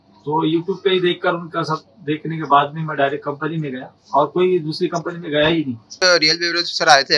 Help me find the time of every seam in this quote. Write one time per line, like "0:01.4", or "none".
0:06.0

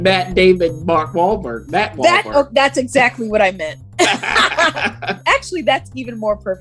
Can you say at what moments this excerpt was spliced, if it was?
0:05.2

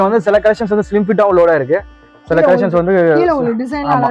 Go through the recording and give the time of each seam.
none

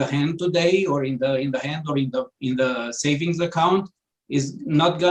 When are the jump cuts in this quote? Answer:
none

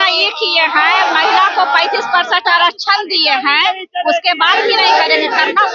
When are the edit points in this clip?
none

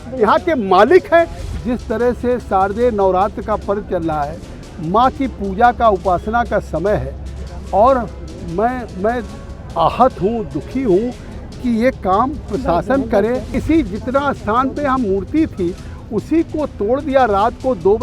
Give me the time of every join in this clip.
0:01.4
0:13.5

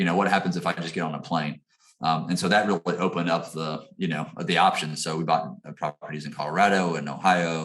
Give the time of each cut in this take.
none

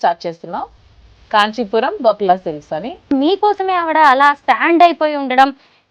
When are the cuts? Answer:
0:03.1

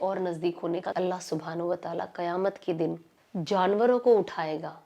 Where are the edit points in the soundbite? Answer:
0:00.9

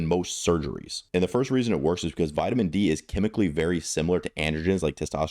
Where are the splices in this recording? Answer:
0:01.0

